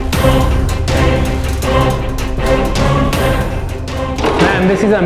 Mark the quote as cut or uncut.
cut